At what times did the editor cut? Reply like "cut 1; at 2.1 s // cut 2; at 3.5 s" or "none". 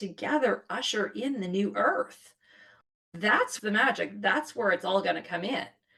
none